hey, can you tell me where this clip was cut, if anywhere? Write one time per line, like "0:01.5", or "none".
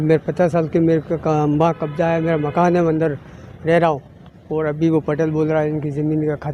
none